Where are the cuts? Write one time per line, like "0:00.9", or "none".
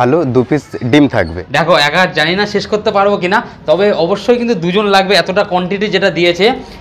0:01.4